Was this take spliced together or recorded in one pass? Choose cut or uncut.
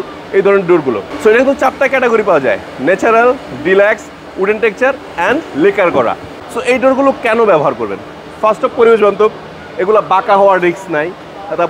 cut